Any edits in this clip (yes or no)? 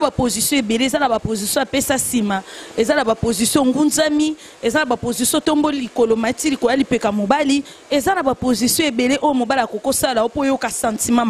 no